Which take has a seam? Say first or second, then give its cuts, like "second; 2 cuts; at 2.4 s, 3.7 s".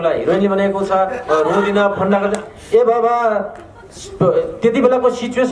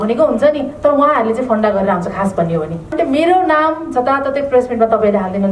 second; 1 cut; at 2.9 s